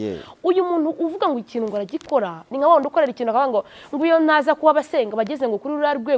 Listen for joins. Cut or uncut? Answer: uncut